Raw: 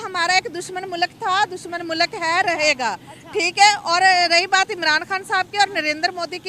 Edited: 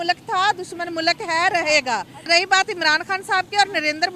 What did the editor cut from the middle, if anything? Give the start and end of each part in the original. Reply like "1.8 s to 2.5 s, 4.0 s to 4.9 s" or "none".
3.2 s to 4.3 s